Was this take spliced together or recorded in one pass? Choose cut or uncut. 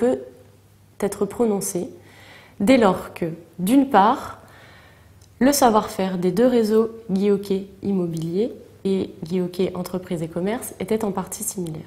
cut